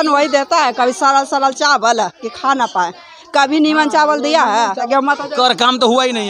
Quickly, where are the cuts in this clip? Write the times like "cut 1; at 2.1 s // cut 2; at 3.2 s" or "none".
cut 1; at 4.9 s